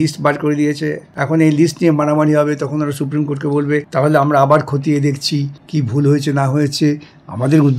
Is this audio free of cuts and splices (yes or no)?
no